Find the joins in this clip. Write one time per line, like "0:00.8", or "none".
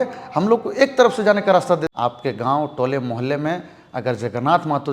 0:01.9